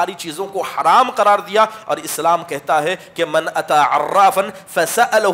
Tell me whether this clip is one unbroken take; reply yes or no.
yes